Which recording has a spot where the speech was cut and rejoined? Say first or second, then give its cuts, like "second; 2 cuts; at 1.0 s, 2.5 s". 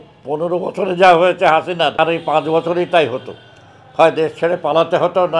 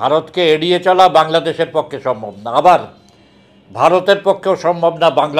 first; 1 cut; at 1.9 s